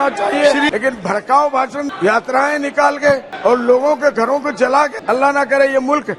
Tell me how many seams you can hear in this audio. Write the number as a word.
four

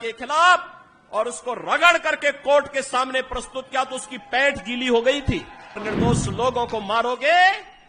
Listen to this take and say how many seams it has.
one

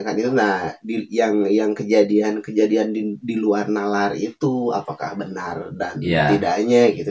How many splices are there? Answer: zero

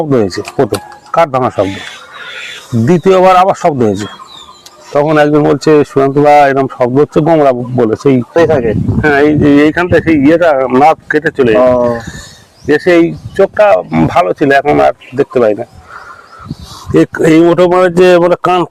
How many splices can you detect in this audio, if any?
one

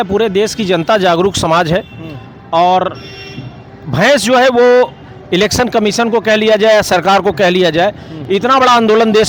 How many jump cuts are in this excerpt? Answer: zero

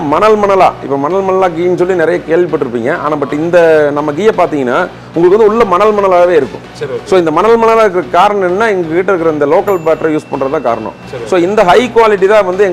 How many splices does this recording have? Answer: zero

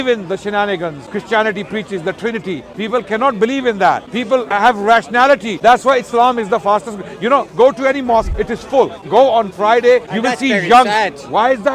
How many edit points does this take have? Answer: six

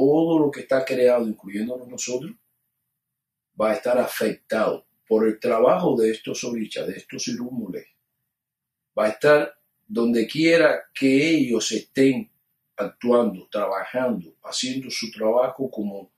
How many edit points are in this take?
zero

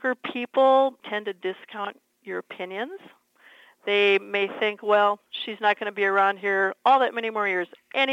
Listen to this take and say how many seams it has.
one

